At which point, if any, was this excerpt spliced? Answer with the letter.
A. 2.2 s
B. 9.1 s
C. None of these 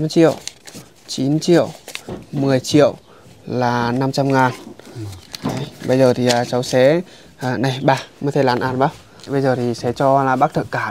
B